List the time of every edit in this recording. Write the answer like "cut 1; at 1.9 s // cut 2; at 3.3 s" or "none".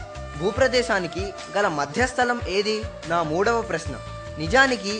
cut 1; at 2.9 s